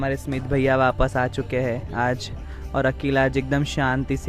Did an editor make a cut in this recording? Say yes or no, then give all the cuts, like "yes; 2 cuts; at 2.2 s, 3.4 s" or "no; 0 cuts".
no; 0 cuts